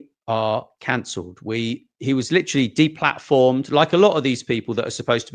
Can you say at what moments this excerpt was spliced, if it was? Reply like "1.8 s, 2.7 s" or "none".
none

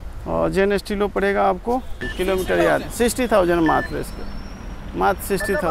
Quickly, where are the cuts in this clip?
2.1 s

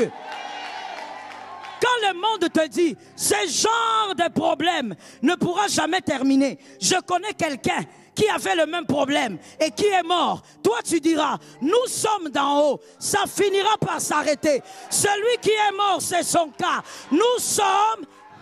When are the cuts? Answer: none

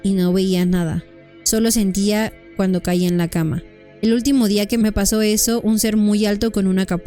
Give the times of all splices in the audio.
4.8 s

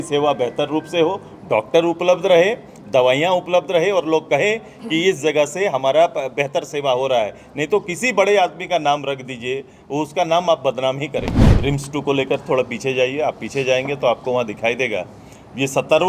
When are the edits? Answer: 11.5 s

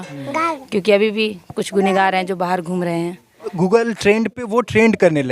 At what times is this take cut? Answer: 3.6 s

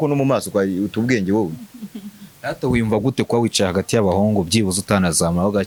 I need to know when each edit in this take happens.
none

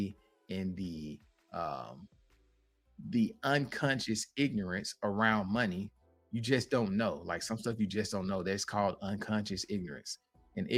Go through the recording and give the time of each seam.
none

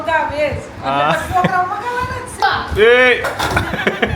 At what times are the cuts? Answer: 2.4 s

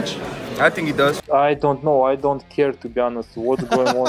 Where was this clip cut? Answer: 1.2 s

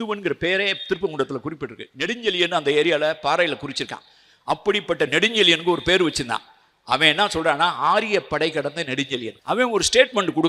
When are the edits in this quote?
9.3 s

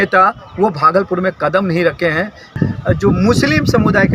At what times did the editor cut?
2.6 s

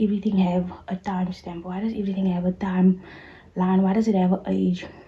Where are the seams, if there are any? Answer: none

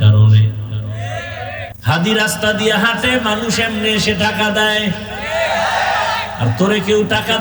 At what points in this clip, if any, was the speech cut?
1.7 s

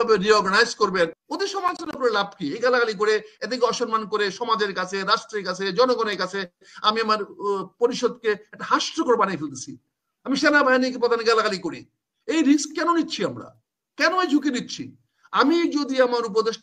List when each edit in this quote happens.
1.2 s

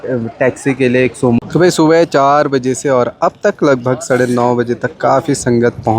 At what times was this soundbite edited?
1.4 s

